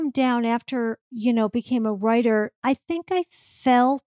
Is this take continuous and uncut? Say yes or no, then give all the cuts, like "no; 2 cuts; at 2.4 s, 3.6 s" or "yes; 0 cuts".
no; 2 cuts; at 1.0 s, 2.6 s